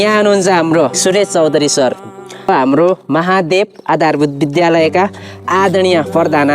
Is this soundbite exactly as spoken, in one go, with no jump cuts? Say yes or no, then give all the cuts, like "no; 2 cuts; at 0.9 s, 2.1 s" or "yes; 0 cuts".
no; 2 cuts; at 1.0 s, 2.5 s